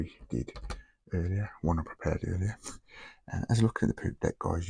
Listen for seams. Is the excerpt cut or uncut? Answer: uncut